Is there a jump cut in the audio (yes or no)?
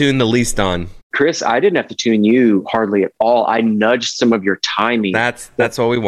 yes